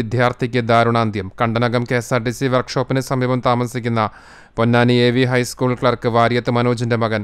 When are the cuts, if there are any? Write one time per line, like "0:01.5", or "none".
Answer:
none